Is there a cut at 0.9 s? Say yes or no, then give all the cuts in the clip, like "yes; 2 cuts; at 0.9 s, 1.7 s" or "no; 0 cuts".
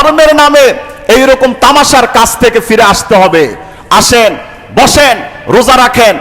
no; 0 cuts